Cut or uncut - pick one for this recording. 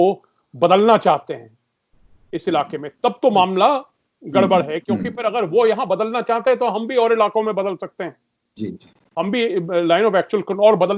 uncut